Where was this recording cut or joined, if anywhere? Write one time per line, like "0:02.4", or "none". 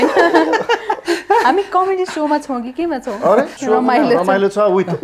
0:03.6